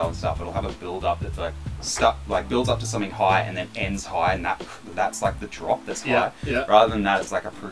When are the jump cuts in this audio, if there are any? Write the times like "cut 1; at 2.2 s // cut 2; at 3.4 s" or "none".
none